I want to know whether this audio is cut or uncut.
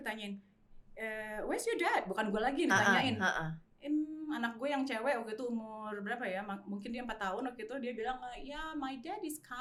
uncut